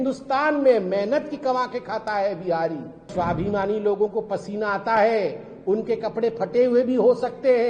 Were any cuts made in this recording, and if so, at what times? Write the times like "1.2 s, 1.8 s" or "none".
3.1 s